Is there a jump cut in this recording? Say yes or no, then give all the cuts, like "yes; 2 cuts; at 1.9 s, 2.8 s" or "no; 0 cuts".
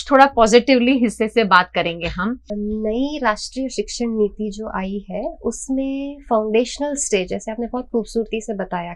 yes; 1 cut; at 2.5 s